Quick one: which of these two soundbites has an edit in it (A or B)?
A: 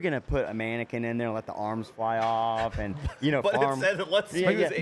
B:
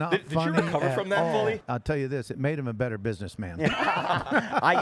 B